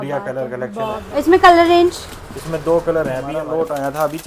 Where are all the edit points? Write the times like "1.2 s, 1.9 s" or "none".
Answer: 1.0 s, 3.4 s